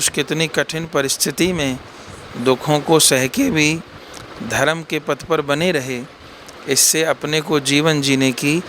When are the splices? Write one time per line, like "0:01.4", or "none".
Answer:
none